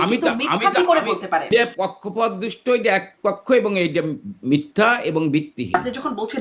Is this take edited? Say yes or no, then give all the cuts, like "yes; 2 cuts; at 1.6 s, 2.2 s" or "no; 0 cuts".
yes; 2 cuts; at 1.5 s, 5.7 s